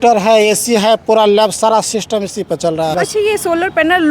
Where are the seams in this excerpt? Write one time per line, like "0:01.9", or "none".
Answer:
0:02.9